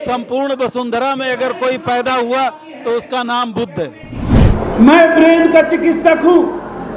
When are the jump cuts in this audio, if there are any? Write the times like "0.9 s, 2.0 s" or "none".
4.6 s